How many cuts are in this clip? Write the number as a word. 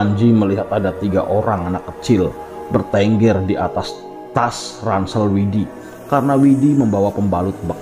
zero